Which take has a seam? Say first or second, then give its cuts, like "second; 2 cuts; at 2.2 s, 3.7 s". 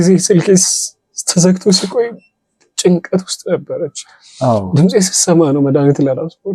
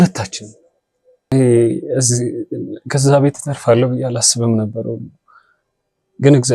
second; 1 cut; at 1.3 s